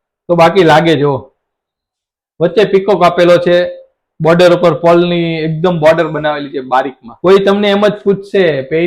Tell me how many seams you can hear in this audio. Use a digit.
1